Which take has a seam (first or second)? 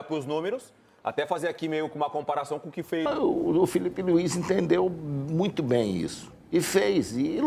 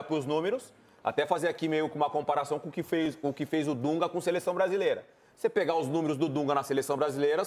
first